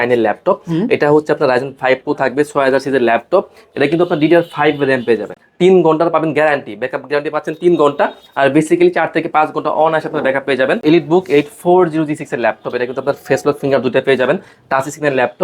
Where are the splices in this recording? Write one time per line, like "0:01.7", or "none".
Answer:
0:05.4
0:10.8